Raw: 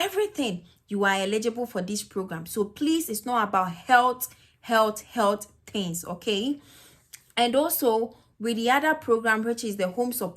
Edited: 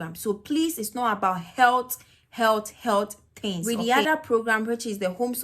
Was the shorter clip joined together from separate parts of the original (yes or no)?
yes